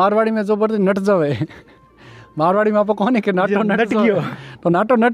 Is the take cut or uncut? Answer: uncut